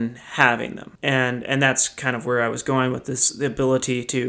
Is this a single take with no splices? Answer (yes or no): yes